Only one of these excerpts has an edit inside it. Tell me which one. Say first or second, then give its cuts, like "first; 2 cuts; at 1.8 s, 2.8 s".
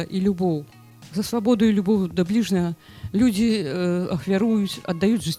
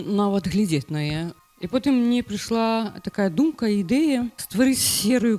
second; 2 cuts; at 1.3 s, 4.4 s